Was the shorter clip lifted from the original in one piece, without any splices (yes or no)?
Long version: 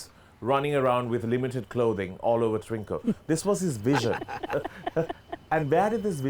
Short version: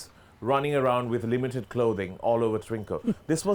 yes